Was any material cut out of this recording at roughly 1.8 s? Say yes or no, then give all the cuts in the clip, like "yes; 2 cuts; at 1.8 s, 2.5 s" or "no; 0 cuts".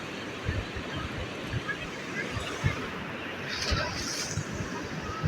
yes; 1 cut; at 1.8 s